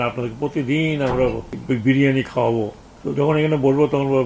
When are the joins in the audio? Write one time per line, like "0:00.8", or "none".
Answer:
0:01.5

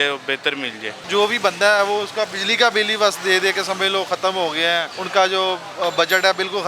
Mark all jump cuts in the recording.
0:01.0
0:05.0

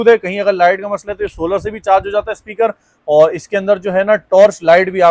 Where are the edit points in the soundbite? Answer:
none

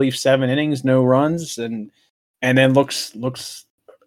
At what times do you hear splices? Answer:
0:02.2

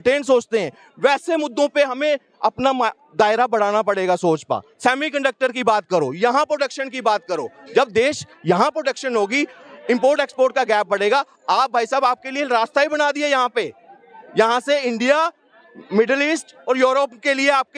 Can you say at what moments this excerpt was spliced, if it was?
none

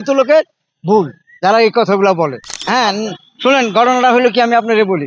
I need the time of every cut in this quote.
0:02.5

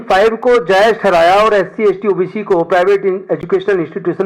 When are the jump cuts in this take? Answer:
none

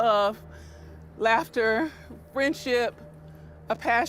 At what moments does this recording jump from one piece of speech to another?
none

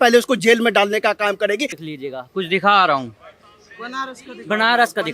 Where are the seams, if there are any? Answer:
0:01.8

